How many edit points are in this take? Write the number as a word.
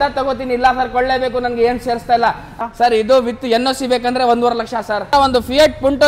two